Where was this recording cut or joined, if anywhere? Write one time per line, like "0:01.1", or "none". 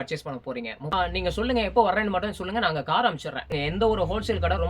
0:00.9
0:03.6

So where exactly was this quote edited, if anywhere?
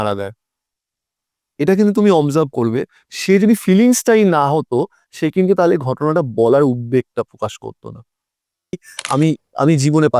0:08.9

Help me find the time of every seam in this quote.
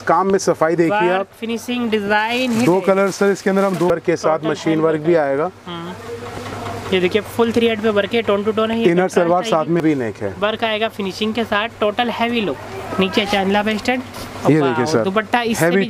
0:03.9
0:09.8

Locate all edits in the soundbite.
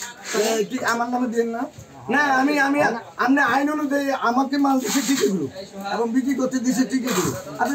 none

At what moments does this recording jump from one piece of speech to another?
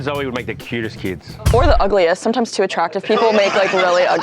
0:01.3

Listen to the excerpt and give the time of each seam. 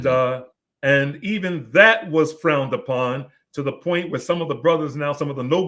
none

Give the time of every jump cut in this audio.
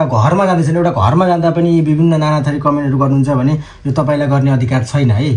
none

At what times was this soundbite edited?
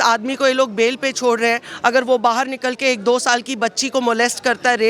none

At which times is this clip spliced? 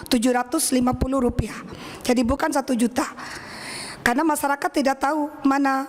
none

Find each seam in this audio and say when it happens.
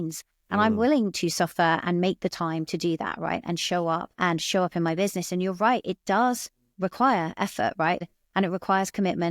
0:08.0

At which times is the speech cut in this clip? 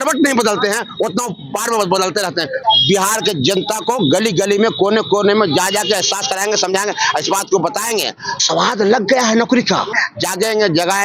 0:02.6
0:09.9

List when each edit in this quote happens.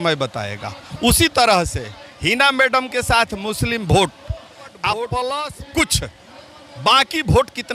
0:05.5

